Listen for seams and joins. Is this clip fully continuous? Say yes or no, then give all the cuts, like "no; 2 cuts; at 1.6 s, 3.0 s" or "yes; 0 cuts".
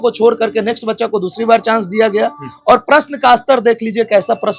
yes; 0 cuts